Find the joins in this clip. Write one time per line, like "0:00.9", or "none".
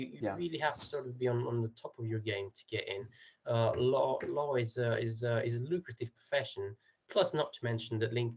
0:06.9